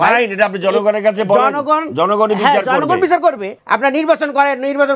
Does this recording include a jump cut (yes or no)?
yes